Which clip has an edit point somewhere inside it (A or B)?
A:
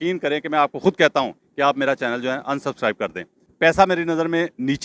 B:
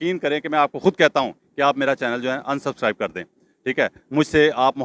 A